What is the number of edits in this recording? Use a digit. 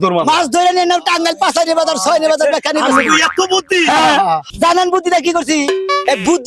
1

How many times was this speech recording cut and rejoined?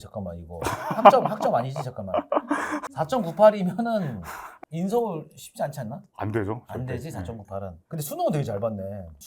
1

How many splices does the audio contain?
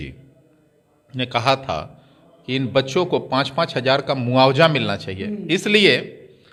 0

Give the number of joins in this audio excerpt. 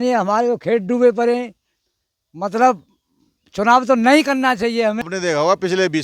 1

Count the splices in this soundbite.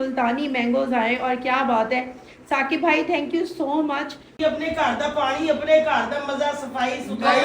1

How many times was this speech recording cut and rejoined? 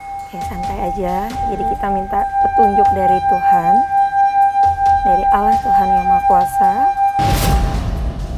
1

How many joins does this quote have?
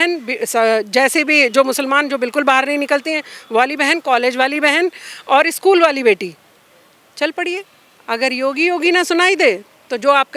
0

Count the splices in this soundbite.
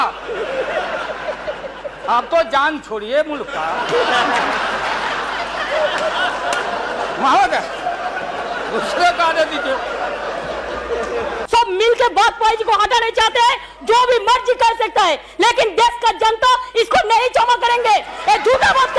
1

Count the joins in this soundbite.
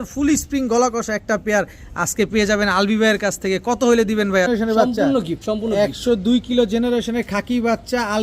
1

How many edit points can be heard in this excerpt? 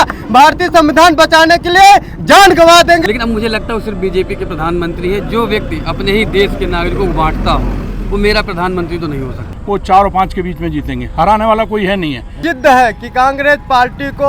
3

